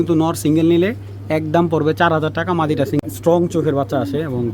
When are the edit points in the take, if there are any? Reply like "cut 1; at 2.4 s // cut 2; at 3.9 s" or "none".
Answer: cut 1; at 3.0 s